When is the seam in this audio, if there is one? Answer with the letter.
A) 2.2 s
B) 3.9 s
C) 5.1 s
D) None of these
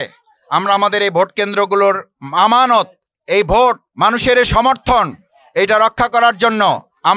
B